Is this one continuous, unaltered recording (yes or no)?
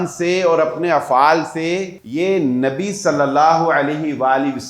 no